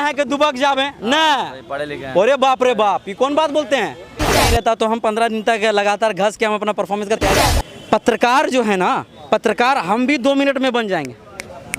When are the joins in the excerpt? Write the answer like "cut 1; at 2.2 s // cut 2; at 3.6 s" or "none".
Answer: cut 1; at 4.4 s // cut 2; at 7.4 s // cut 3; at 9.1 s